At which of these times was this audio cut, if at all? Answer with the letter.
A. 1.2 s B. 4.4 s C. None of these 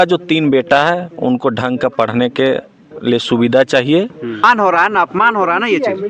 B